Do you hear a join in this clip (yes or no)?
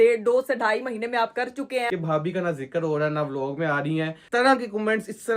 yes